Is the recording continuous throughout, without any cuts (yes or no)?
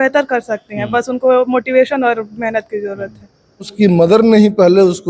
no